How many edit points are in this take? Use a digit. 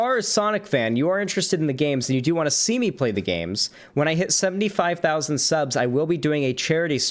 0